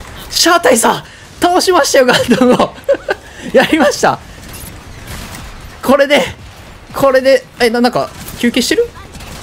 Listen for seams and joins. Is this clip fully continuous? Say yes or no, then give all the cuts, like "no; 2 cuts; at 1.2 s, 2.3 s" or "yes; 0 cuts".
yes; 0 cuts